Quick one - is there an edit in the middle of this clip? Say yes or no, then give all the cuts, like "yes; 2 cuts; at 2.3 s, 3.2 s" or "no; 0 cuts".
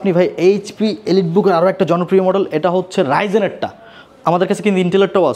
no; 0 cuts